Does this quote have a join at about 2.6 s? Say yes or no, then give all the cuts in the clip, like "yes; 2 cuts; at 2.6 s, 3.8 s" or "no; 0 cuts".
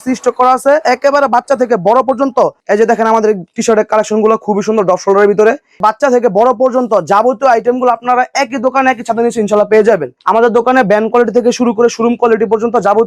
yes; 3 cuts; at 2.6 s, 5.8 s, 10.1 s